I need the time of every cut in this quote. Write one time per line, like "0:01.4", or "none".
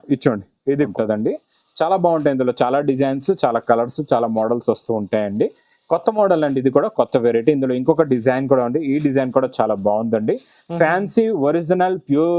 0:00.9

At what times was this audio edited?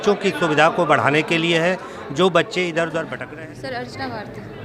0:03.2

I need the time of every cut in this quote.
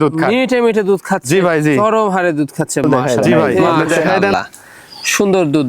0:04.3

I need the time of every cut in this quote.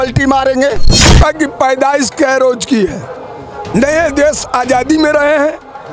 0:01.1

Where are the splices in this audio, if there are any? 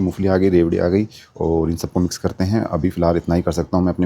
none

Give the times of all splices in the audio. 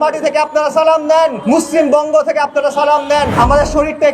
0:01.4
0:03.3

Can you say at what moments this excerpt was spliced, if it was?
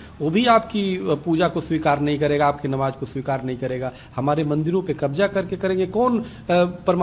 none

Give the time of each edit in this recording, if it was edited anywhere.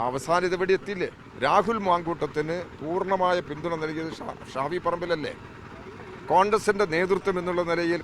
0:01.2

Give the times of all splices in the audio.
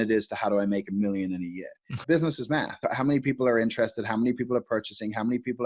0:02.0

